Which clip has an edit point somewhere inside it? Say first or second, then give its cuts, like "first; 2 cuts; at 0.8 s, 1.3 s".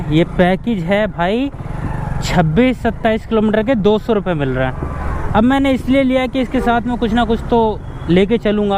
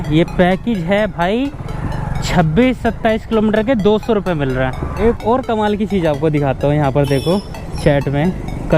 second; 1 cut; at 4.9 s